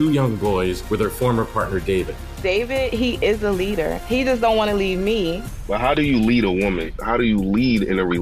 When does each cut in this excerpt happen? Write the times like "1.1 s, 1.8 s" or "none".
none